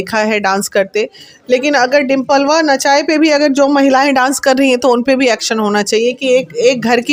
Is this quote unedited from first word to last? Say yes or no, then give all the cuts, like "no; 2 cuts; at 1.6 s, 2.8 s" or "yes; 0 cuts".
yes; 0 cuts